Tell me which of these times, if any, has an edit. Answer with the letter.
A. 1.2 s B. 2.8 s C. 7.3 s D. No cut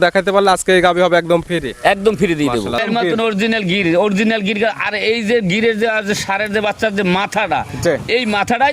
B